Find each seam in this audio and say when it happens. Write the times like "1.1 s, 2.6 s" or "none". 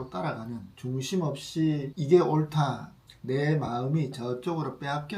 1.9 s